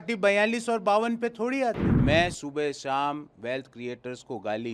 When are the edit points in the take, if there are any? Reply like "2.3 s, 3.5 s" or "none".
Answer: 1.9 s